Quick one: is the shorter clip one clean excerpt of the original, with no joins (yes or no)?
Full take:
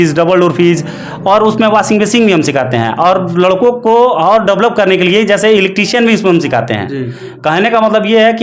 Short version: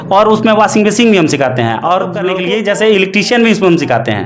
no